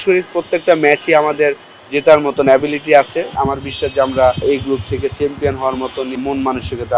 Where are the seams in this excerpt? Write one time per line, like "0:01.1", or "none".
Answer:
0:03.3
0:04.4
0:06.2